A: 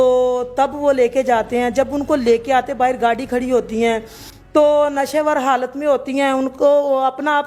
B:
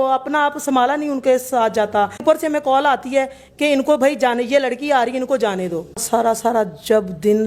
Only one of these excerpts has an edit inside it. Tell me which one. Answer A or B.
B